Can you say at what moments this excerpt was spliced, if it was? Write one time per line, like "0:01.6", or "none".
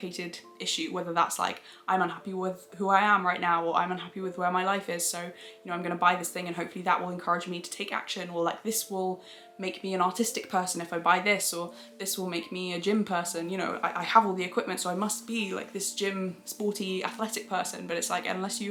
none